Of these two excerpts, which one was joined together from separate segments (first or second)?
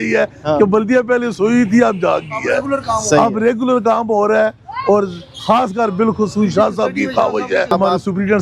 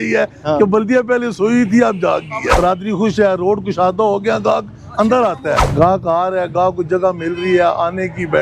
second